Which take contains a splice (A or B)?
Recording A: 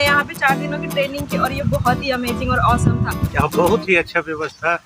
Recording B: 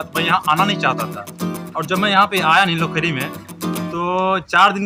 A